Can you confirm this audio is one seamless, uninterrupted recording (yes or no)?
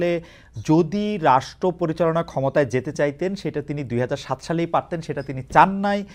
yes